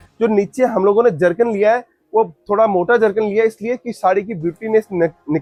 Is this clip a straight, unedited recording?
yes; 0 cuts

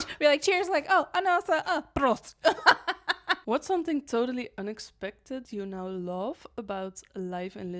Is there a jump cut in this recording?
yes; 1 cut; at 3.3 s

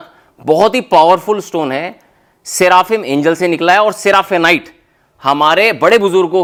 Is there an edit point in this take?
no; 0 cuts

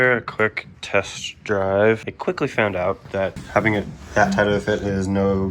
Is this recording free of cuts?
no; 2 cuts; at 2.1 s, 3.4 s

